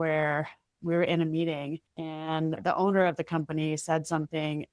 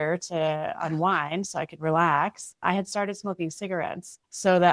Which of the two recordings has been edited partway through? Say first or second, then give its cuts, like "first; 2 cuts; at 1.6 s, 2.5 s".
second; 1 cut; at 2.6 s